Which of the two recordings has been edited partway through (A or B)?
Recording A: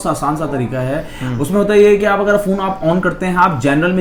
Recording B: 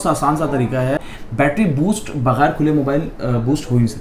B